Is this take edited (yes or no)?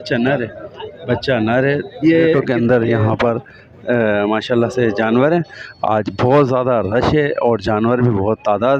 yes